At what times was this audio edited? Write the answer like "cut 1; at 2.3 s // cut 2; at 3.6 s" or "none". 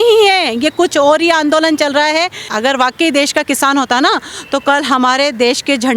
cut 1; at 2.5 s